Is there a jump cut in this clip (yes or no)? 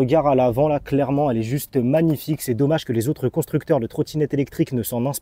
no